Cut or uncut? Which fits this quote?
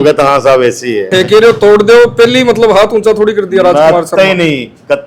cut